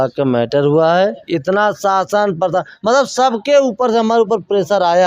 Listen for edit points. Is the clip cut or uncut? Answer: cut